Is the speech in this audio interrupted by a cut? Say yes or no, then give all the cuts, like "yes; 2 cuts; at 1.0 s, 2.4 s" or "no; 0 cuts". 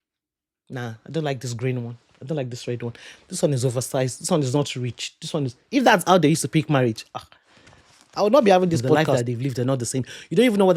yes; 1 cut; at 9.0 s